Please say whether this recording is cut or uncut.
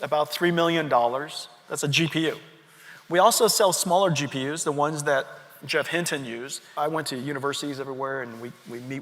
cut